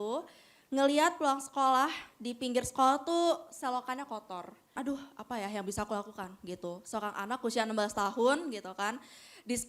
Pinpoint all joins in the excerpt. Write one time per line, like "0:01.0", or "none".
0:04.8